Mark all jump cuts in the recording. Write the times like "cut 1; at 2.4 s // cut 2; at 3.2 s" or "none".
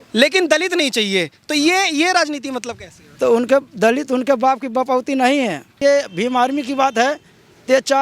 cut 1; at 5.7 s